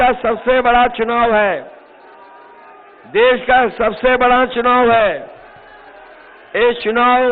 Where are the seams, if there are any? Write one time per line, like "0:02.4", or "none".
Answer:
none